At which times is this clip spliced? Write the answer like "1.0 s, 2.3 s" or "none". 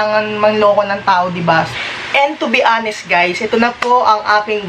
1.7 s